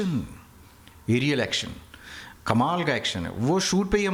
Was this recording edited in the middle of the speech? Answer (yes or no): no